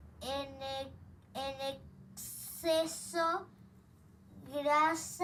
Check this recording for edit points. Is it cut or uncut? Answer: uncut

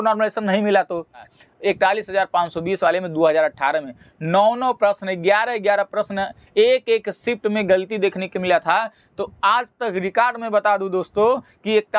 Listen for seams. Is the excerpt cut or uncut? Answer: cut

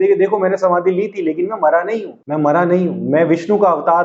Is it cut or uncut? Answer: cut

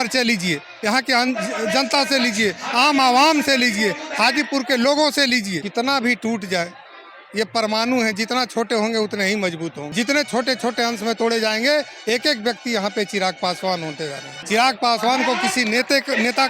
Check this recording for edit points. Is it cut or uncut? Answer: cut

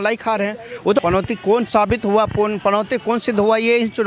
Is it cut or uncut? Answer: cut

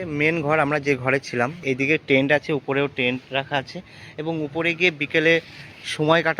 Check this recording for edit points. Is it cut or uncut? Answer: cut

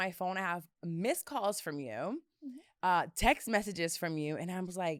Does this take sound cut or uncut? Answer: uncut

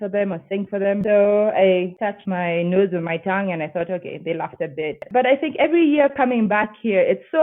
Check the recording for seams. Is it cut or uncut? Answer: cut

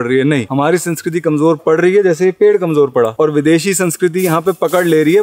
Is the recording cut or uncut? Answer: uncut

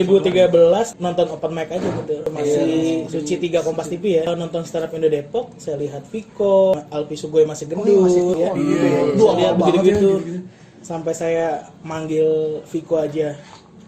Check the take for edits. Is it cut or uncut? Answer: cut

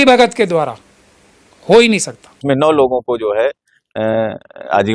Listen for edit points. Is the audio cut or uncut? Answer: cut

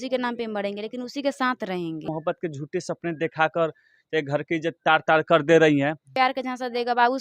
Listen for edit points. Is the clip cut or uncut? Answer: cut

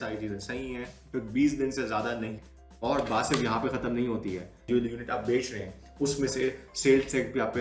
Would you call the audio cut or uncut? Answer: cut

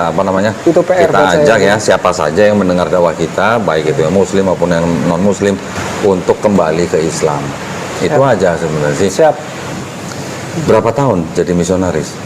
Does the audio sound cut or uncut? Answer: uncut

